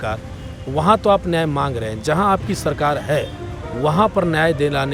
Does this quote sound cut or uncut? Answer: uncut